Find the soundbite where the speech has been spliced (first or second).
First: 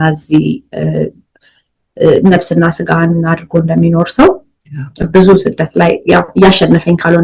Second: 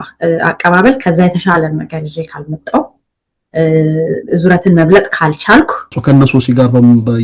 second